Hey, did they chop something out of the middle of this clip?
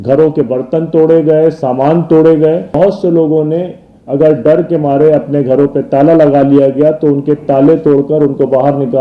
yes; 1 cut; at 2.8 s

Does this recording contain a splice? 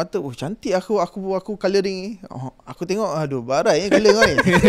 no; 0 cuts

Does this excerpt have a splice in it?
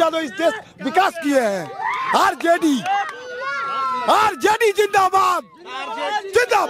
no; 0 cuts

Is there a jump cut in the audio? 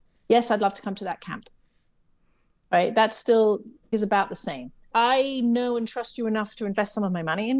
yes; 2 cuts; at 3.9 s, 4.7 s

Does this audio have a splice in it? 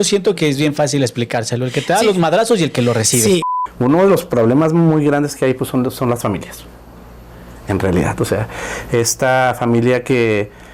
yes; 1 cut; at 3.5 s

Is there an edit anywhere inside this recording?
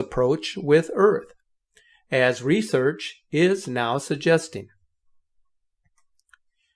yes; 1 cut; at 2.6 s

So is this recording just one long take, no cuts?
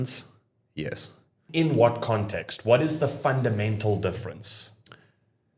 no; 1 cut; at 1.5 s

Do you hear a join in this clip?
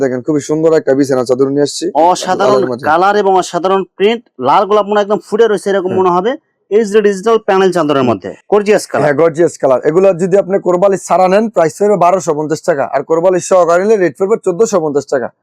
no; 0 cuts

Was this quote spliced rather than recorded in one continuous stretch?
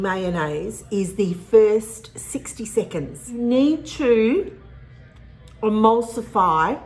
yes; 1 cut; at 3.4 s

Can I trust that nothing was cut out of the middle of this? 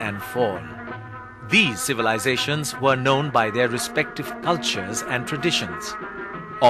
yes; 0 cuts

